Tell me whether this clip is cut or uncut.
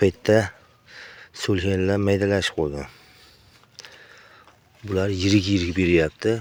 uncut